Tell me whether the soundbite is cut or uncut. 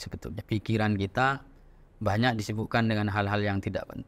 uncut